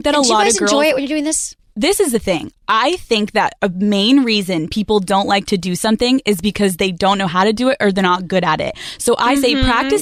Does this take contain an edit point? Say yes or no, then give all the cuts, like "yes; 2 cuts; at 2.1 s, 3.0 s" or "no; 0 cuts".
no; 0 cuts